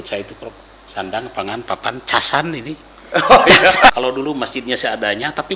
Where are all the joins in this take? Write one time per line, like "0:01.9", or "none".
0:03.9